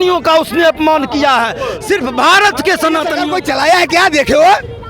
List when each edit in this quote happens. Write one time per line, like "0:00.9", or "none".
0:03.2